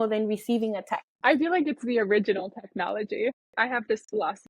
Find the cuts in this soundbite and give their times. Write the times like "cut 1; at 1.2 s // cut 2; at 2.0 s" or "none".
cut 1; at 1.0 s // cut 2; at 3.5 s